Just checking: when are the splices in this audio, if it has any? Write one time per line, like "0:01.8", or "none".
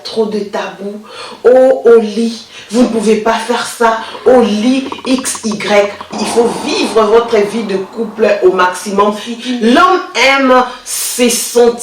0:06.1
0:09.3